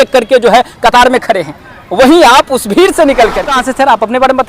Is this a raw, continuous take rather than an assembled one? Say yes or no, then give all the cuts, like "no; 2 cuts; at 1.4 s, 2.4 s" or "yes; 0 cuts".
no; 1 cut; at 3.5 s